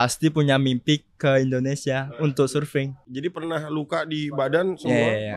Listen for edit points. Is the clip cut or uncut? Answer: cut